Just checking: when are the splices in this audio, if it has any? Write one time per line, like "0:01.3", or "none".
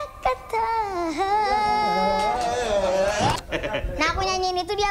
0:03.4